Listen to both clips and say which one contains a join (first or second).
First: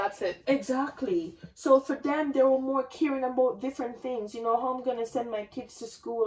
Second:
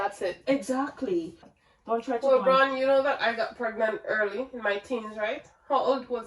second